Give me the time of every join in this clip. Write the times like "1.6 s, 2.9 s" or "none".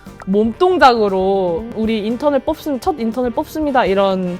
1.6 s